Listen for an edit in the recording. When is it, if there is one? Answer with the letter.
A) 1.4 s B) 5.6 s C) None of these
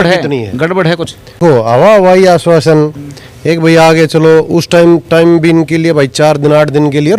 A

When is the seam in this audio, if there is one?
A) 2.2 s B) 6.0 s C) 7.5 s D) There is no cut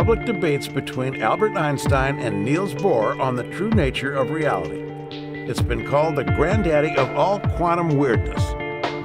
A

